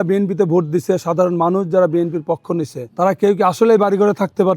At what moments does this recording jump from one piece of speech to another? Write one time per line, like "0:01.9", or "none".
0:02.8